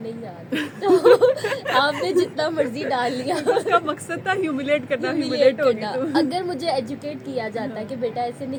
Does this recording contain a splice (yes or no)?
no